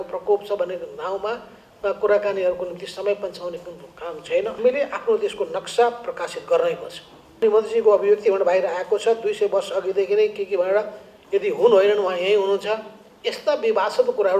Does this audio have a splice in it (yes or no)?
yes